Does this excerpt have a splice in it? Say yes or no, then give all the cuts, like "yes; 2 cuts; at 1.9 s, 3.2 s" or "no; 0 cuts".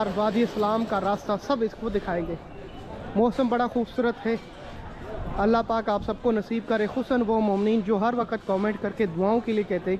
no; 0 cuts